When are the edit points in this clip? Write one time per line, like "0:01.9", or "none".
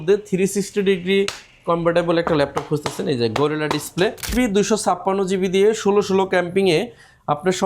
0:04.3